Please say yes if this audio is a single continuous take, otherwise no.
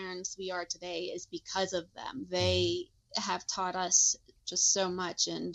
yes